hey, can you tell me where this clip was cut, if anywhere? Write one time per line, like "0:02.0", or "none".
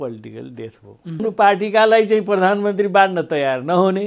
0:01.2